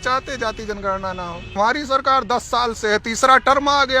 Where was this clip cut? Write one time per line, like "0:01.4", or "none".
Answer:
0:01.6

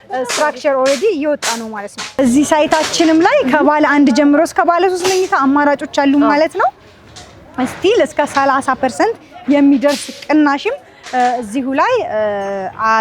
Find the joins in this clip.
0:02.2

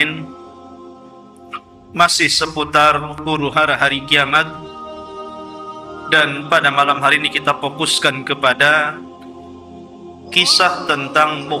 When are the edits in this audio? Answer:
0:04.5
0:06.1
0:08.9
0:10.3

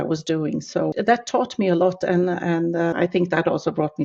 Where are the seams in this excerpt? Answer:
0:00.9
0:02.9

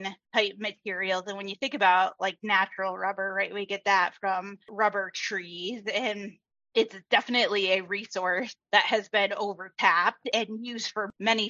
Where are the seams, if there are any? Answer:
none

